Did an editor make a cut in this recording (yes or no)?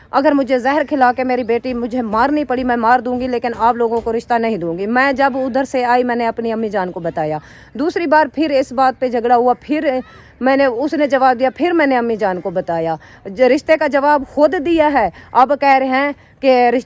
no